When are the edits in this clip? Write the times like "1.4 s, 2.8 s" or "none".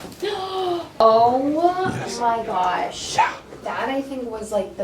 1.0 s, 3.5 s

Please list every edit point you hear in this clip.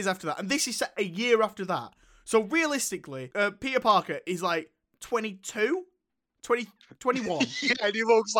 3.2 s

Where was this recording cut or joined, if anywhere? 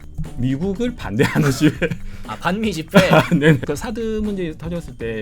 3.6 s

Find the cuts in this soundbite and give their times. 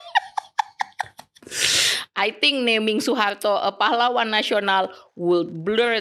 none

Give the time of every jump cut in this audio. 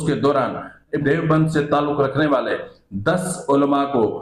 1.0 s

